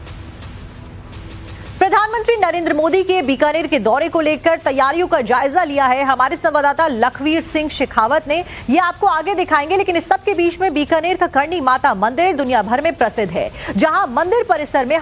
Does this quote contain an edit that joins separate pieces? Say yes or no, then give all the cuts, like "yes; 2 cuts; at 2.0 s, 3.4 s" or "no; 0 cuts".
no; 0 cuts